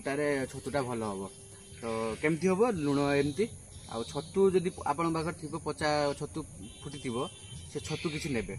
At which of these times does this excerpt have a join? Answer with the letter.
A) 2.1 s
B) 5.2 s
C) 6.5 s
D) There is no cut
D